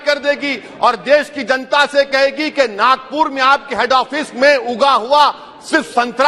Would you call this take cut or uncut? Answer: uncut